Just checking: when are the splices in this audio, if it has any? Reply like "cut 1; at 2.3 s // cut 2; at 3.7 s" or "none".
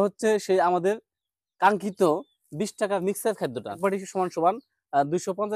cut 1; at 3.8 s